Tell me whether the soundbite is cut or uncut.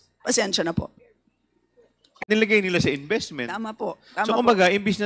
cut